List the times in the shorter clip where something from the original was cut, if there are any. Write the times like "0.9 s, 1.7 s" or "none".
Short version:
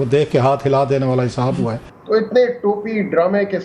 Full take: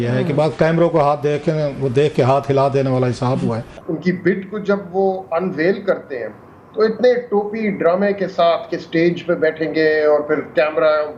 1.9 s